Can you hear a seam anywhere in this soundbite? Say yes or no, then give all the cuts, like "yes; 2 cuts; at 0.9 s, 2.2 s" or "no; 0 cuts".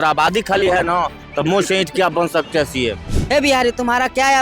yes; 1 cut; at 3.1 s